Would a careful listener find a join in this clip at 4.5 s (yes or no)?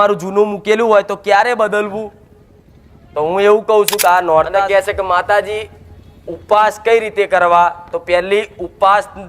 yes